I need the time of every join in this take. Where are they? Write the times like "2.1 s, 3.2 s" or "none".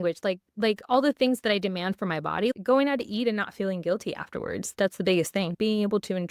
2.5 s, 4.7 s, 5.5 s